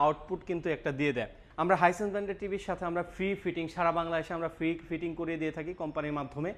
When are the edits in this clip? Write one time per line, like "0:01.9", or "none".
0:01.4